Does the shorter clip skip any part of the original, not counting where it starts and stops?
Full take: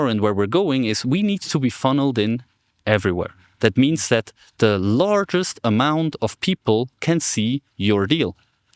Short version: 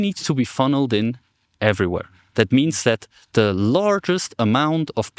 no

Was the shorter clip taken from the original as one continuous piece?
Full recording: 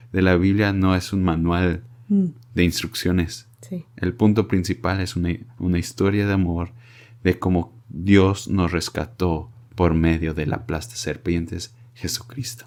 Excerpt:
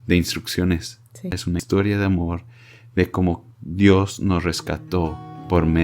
no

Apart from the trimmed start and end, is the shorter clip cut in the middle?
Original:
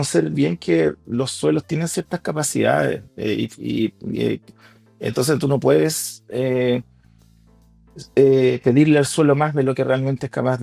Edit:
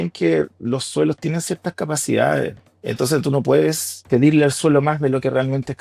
yes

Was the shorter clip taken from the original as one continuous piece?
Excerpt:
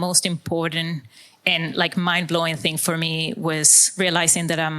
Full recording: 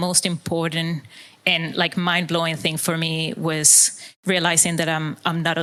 no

